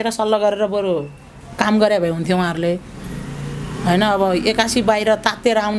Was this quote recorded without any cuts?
yes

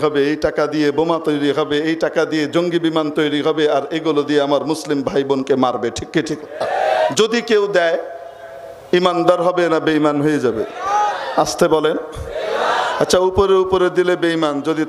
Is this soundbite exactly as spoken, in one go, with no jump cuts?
no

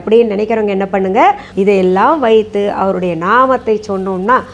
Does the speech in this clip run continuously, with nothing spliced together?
no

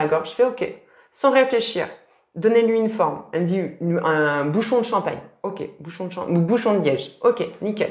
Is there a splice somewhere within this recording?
no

